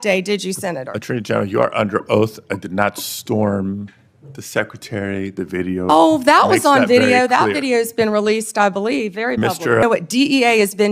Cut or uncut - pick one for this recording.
cut